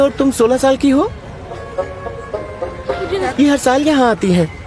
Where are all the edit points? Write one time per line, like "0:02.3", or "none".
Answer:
none